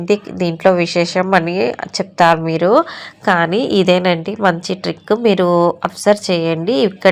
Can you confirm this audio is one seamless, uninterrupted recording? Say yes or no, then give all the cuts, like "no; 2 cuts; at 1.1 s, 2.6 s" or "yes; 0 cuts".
yes; 0 cuts